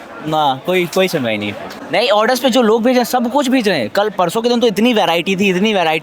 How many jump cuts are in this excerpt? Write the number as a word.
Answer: one